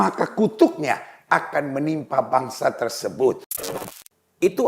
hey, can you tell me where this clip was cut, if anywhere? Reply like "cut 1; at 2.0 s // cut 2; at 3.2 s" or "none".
cut 1; at 3.7 s